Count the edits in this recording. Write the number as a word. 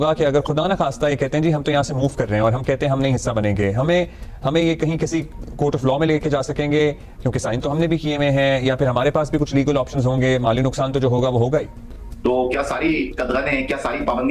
one